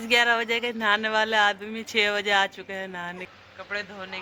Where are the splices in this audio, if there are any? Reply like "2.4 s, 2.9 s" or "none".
3.3 s